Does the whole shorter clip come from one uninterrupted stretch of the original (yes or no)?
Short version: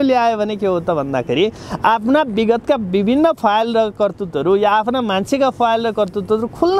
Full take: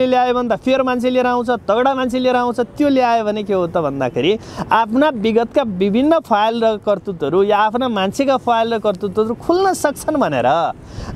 yes